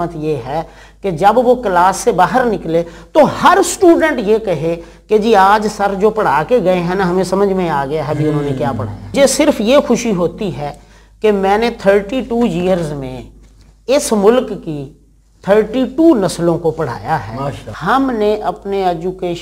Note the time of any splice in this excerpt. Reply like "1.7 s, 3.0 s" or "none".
9.1 s, 17.6 s